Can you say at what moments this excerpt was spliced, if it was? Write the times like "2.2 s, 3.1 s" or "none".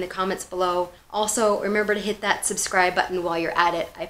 1.0 s